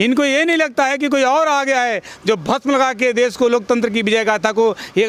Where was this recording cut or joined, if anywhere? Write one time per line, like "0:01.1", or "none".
none